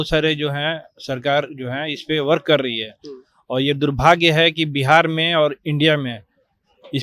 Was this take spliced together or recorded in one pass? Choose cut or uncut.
uncut